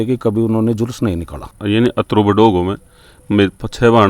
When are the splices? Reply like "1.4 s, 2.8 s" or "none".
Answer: 1.5 s